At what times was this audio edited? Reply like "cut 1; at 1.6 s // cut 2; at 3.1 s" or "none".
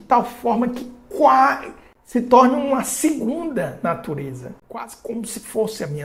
none